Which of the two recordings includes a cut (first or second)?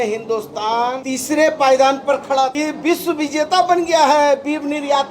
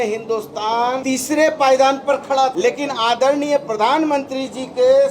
first